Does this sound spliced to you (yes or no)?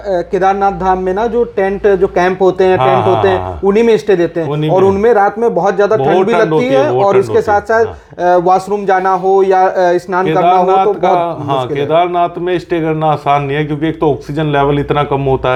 no